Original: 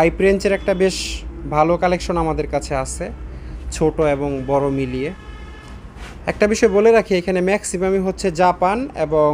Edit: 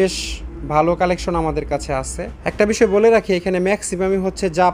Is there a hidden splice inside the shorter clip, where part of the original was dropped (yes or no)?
yes